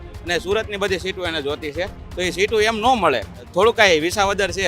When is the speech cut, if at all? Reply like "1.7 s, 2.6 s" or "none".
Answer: 3.4 s